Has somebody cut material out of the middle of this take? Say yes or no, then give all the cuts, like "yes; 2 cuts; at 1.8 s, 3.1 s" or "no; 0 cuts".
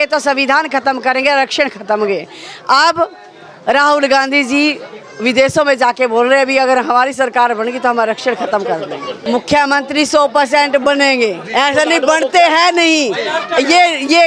yes; 1 cut; at 9.1 s